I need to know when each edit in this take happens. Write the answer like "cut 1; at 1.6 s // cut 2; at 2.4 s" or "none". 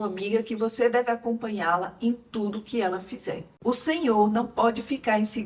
cut 1; at 3.5 s